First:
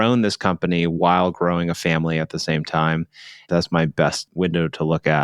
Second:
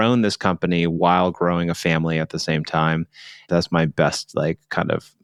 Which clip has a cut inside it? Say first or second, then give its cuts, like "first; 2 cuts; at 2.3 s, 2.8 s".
first; 1 cut; at 4.3 s